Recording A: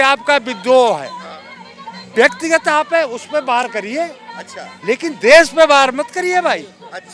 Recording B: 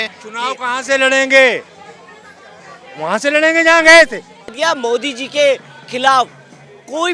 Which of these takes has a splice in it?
B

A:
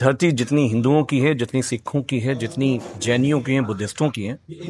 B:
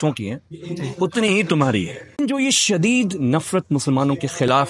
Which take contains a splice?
B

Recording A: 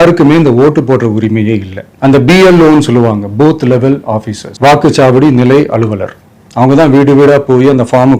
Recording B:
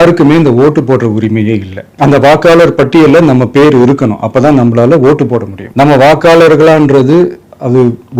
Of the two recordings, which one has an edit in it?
B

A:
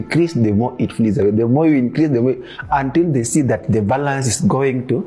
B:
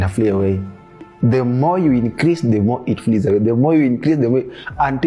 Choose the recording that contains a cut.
B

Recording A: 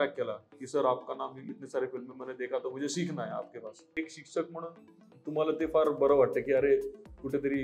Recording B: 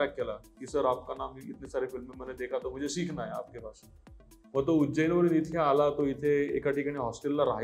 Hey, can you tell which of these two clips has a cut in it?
A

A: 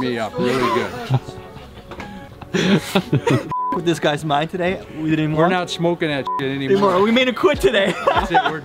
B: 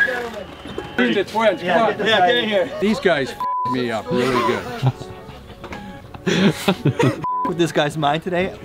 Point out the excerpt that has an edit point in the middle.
B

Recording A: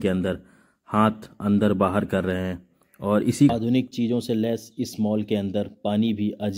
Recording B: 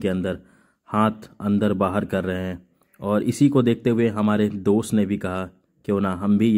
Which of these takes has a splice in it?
A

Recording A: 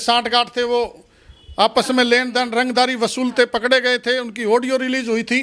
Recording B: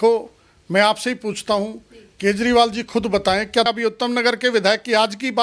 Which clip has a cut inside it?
B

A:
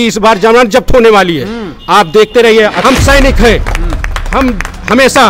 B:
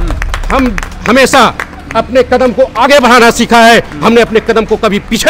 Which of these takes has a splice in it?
A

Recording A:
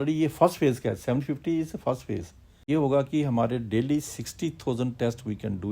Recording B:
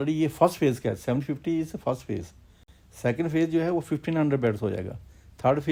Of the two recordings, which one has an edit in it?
A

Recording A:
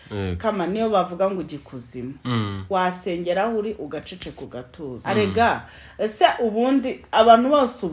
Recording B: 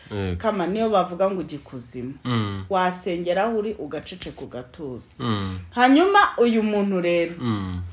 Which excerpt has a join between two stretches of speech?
A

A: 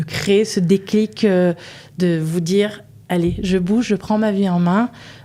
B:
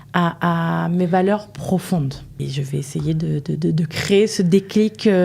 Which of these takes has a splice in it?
B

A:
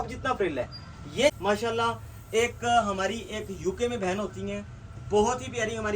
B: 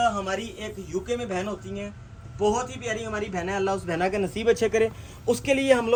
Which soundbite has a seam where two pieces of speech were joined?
A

